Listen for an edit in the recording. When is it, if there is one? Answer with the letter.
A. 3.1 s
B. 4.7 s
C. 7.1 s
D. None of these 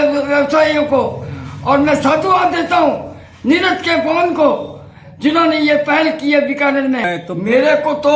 C